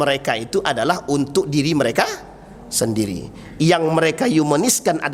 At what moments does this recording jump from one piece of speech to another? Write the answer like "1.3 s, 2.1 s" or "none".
none